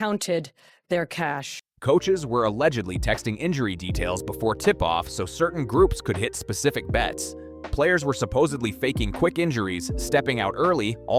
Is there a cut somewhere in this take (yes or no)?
no